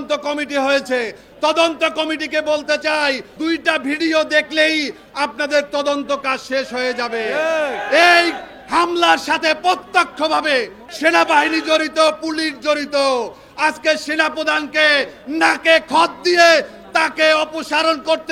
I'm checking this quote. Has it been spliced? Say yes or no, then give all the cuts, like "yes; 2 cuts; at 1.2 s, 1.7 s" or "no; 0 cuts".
yes; 2 cuts; at 3.3 s, 10.8 s